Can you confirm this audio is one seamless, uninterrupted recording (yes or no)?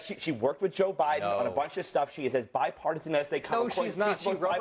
yes